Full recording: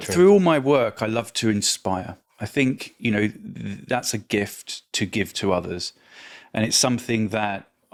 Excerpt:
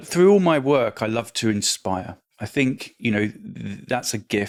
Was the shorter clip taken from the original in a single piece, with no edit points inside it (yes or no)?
yes